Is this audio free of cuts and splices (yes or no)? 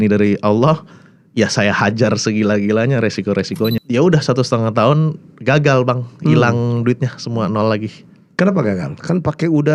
no